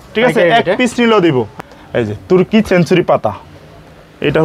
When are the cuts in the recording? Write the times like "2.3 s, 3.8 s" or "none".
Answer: 1.5 s